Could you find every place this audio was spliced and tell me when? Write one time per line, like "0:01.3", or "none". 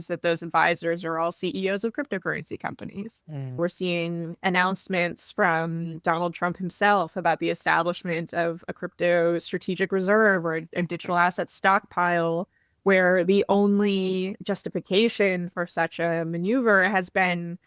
0:03.6
0:14.4